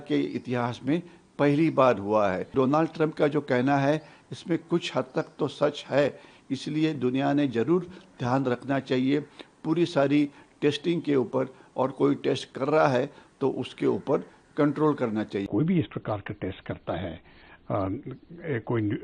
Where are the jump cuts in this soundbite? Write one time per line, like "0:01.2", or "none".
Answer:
0:02.4
0:15.5